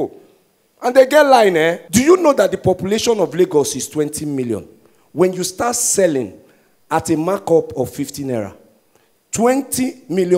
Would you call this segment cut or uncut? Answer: cut